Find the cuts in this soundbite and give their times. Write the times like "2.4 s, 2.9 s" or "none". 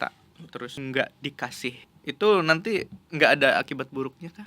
0.7 s, 1.9 s